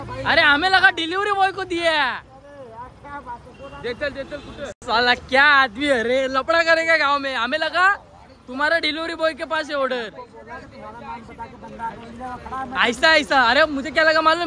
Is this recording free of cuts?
yes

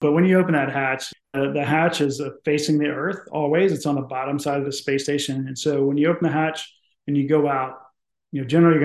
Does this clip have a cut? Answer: yes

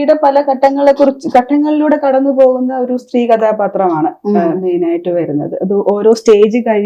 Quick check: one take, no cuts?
yes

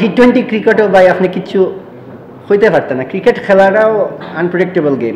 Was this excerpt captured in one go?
yes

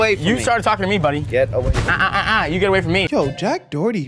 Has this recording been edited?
yes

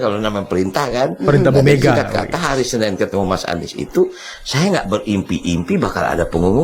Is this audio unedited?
yes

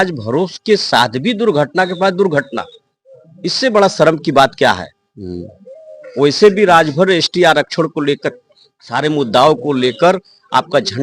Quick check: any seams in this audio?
no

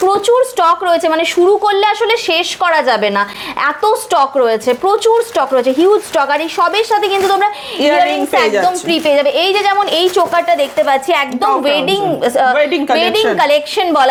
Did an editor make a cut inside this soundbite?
no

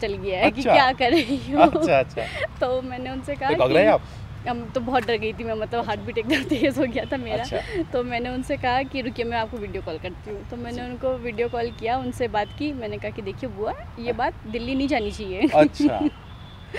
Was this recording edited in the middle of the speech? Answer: no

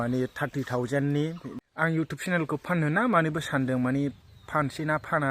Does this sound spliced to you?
yes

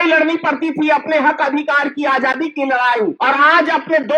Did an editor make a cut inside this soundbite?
yes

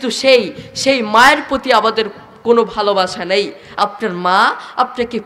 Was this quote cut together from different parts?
yes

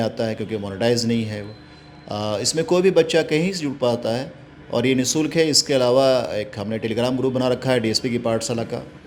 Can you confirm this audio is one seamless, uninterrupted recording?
yes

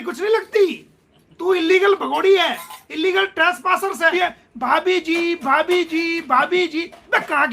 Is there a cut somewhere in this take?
yes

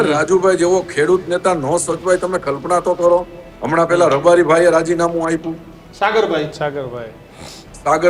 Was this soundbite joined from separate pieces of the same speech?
no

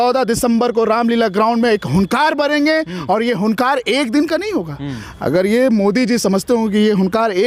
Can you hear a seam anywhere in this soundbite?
no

